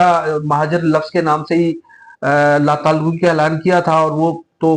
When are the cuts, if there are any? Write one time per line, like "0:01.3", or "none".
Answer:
none